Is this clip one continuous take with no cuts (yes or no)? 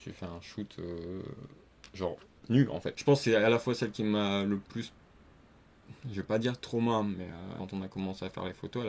no